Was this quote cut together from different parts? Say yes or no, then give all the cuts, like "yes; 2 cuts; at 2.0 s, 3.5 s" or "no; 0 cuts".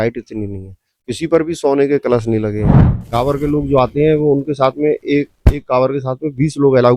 yes; 1 cut; at 2.9 s